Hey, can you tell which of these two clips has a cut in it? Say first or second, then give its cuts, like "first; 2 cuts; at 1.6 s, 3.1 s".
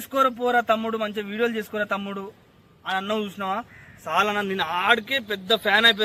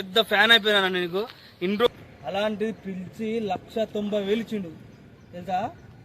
second; 1 cut; at 1.9 s